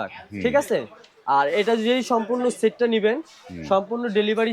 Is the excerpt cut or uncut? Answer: uncut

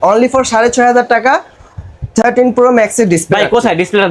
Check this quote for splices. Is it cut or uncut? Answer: uncut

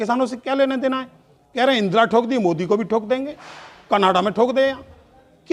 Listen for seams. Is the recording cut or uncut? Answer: uncut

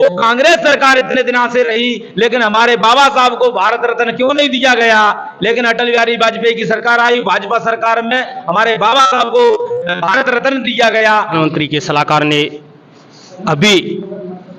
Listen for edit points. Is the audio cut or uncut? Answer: cut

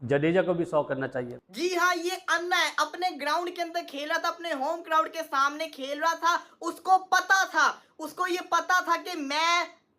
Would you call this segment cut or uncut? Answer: cut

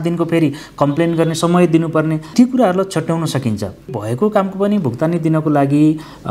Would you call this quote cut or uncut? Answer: cut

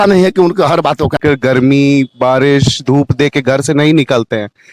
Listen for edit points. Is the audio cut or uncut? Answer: cut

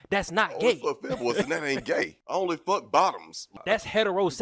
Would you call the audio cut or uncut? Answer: cut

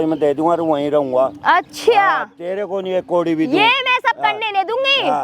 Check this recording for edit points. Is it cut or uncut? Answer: uncut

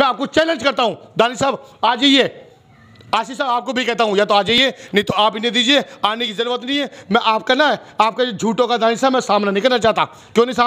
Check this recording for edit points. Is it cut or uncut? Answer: uncut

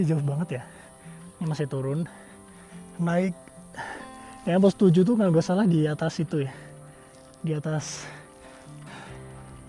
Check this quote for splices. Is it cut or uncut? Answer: uncut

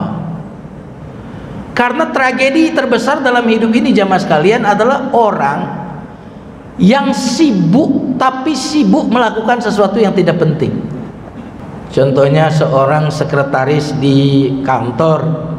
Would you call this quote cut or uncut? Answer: cut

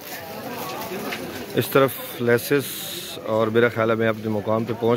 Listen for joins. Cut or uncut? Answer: uncut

